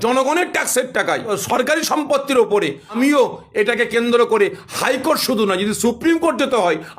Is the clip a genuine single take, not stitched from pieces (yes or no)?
no